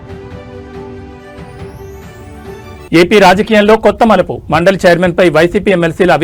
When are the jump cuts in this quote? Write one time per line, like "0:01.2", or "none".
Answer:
none